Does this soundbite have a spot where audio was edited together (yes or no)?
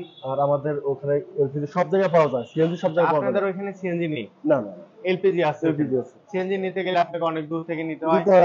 no